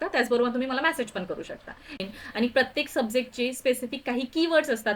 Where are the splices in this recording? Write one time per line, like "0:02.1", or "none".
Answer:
0:02.2